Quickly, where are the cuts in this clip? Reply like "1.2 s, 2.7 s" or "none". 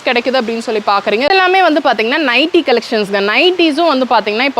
1.3 s